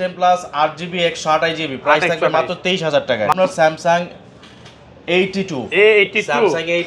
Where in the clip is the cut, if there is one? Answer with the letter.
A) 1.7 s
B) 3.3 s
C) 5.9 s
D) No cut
B